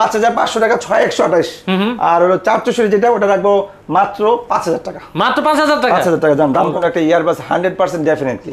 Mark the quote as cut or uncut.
cut